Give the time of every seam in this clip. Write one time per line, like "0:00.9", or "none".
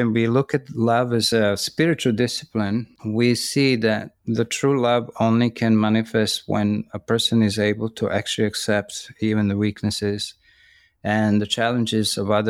0:01.3
0:03.0